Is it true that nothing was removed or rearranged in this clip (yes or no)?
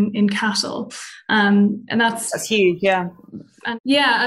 yes